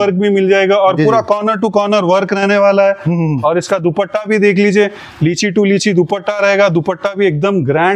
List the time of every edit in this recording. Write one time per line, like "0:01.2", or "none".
none